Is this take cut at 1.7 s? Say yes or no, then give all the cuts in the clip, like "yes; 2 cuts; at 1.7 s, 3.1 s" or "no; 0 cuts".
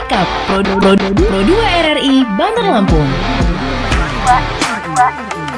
no; 0 cuts